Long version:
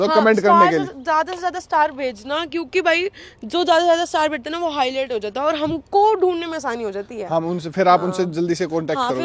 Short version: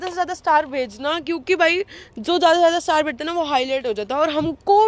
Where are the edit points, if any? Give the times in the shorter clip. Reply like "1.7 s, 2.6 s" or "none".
none